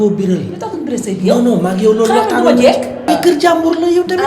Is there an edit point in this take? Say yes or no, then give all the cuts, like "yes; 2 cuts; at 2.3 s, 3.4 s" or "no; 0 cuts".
yes; 1 cut; at 3.1 s